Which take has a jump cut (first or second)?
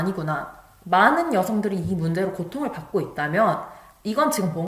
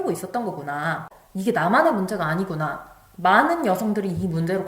second